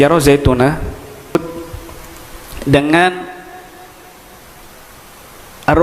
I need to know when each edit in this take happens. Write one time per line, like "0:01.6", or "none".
0:01.4